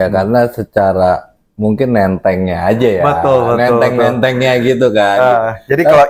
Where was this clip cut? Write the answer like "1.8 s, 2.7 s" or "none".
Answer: none